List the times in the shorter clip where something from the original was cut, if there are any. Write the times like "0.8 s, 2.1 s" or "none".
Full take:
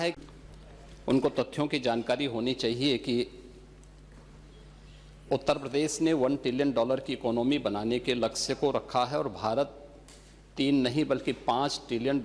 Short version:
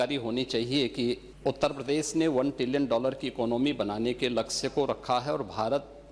1.3 s